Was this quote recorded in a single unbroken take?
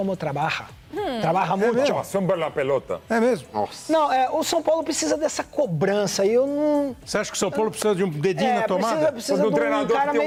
yes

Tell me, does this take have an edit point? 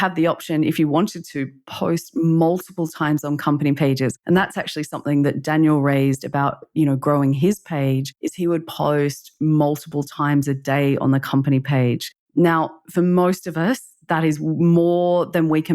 no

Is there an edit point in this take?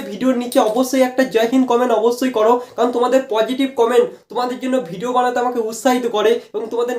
no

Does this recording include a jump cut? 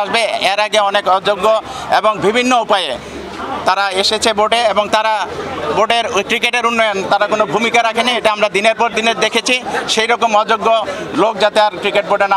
no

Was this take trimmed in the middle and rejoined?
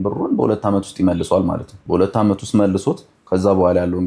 yes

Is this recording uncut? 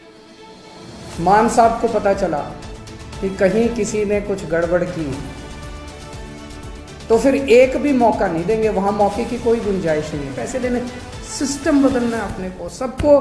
no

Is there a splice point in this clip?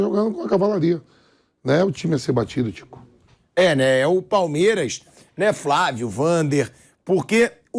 no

